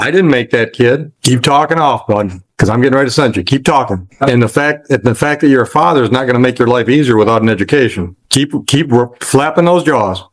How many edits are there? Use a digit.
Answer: 3